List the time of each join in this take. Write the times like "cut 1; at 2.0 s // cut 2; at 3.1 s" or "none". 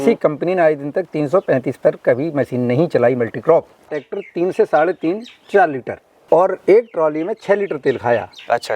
cut 1; at 3.9 s // cut 2; at 6.1 s